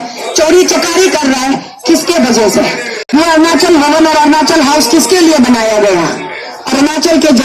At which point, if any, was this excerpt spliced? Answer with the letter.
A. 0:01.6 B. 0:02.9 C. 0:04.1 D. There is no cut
B